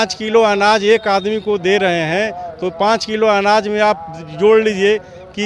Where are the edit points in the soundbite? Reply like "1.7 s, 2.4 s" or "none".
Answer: none